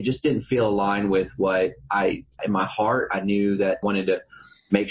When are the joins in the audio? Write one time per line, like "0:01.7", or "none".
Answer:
0:02.3
0:03.8